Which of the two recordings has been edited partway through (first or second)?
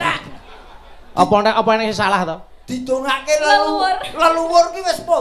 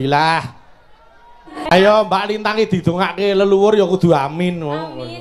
second